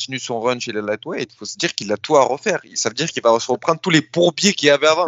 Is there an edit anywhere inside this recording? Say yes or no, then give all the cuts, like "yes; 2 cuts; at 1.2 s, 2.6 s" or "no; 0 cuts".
no; 0 cuts